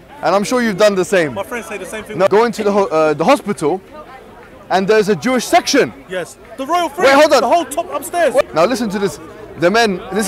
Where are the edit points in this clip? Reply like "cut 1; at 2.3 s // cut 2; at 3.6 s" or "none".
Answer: cut 1; at 2.3 s // cut 2; at 8.4 s